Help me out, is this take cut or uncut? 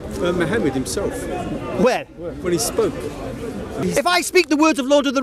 cut